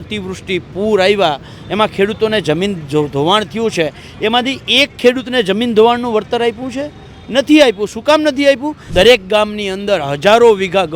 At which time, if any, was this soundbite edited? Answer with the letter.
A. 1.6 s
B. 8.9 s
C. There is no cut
B